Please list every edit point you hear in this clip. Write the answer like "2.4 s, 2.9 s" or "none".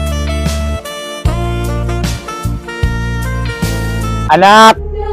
none